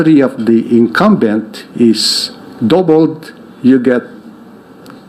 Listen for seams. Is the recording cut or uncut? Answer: uncut